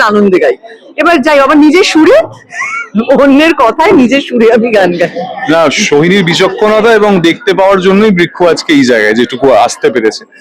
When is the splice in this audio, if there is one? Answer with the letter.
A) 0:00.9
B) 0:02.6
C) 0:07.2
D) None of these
D